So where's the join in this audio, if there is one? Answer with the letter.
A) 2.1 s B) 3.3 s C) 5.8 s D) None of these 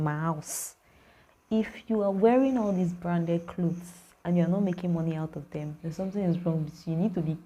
C